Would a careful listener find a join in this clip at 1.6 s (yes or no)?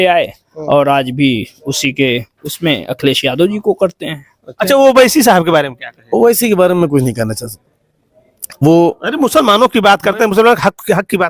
no